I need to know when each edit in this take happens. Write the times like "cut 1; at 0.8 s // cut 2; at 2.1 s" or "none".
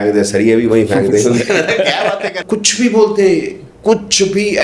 cut 1; at 2.4 s